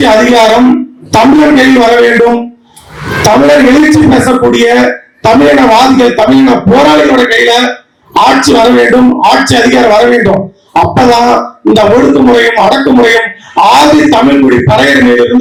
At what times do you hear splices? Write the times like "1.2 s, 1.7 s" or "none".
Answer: none